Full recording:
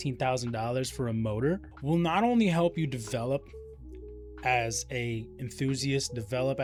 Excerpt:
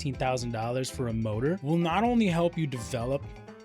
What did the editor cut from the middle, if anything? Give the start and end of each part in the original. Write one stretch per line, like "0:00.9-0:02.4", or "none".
0:01.6-0:01.8

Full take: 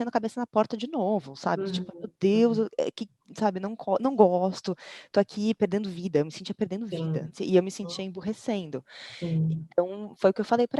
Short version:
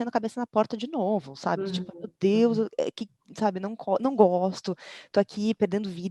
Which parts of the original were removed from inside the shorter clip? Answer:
none

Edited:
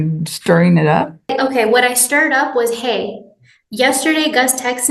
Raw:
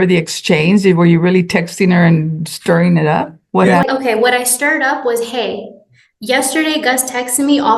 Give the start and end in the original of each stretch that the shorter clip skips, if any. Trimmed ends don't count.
0:03.5-0:03.8

